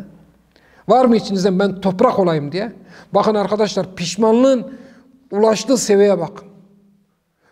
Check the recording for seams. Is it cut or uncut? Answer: uncut